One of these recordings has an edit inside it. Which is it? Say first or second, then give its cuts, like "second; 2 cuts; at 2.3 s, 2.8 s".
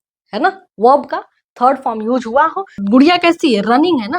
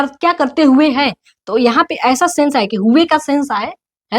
first; 1 cut; at 2.8 s